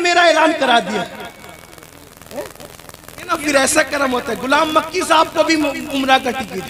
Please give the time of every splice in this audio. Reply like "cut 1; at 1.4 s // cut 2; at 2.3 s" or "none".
cut 1; at 3.3 s